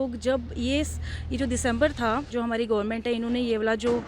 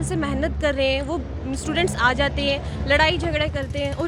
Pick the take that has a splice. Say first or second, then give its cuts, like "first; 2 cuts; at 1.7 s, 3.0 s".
first; 1 cut; at 2.3 s